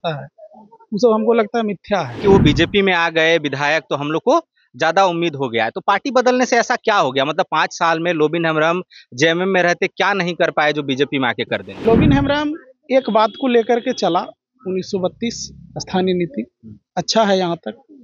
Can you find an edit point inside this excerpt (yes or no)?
yes